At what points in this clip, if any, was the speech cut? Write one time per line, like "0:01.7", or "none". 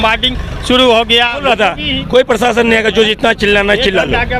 0:01.4